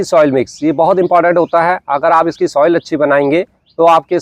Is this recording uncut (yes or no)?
yes